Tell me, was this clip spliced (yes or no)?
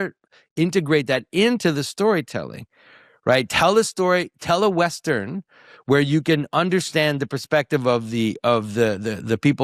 no